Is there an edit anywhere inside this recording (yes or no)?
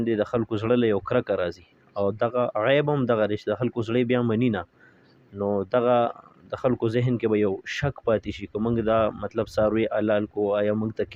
no